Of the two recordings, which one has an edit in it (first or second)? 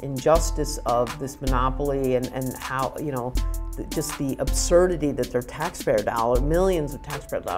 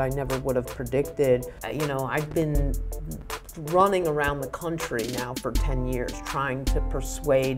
second